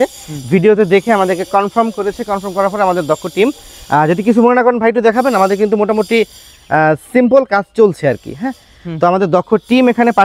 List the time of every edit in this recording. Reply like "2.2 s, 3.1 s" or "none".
none